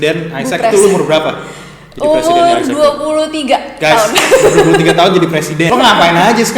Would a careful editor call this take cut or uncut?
cut